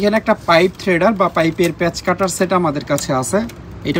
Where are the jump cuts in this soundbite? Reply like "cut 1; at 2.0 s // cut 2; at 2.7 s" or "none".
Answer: none